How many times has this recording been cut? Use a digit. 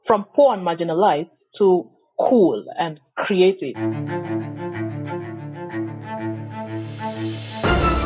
1